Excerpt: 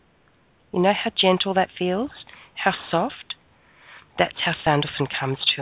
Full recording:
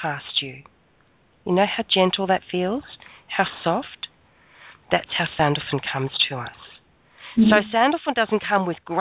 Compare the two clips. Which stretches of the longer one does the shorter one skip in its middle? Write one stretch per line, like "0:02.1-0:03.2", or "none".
none

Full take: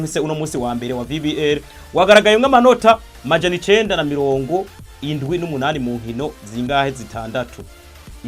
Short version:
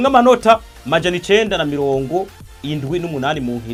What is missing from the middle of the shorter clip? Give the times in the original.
none

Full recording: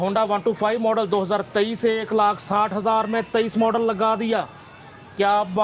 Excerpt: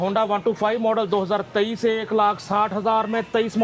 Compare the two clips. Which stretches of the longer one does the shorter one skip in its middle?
none

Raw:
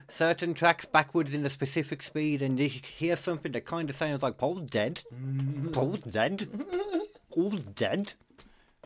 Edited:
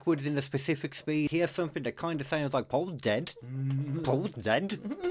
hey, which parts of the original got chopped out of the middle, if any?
0:02.4-0:03.0

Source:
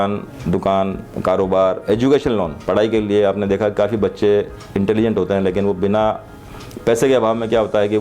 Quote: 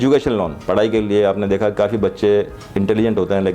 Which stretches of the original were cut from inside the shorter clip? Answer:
none

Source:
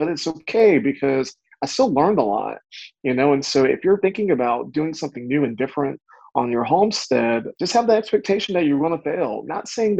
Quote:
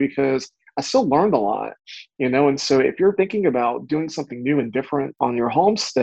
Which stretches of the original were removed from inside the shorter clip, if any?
0:06.0-0:06.3

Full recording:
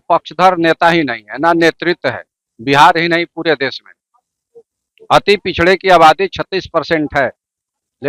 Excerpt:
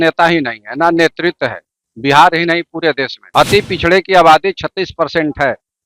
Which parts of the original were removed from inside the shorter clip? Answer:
0:03.8-0:04.9

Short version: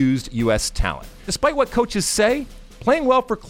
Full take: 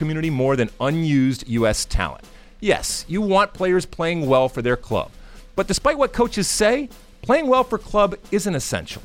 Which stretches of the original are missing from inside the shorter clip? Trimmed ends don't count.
0:02.5-0:05.7

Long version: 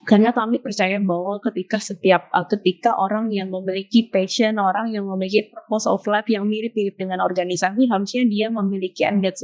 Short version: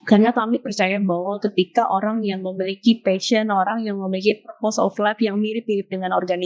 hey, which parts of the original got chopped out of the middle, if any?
0:01.4-0:02.5

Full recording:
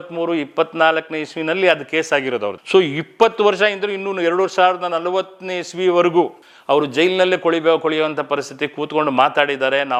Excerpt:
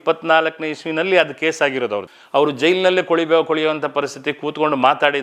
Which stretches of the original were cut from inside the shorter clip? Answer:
0:02.6-0:06.4

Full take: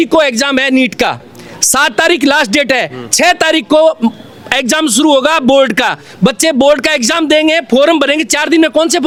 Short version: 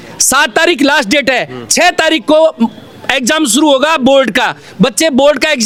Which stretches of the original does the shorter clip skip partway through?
none

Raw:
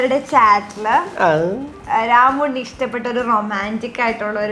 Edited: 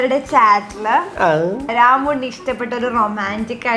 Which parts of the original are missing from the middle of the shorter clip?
0:01.7-0:02.0

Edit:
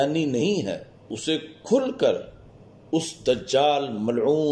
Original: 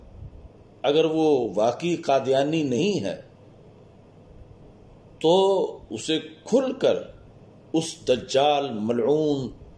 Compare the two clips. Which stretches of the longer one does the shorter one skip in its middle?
0:03.4-0:05.9

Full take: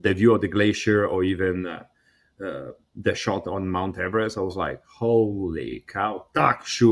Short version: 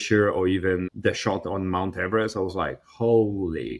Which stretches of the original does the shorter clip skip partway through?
0:01.7-0:02.9

